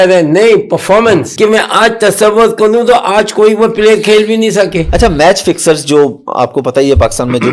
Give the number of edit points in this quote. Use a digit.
2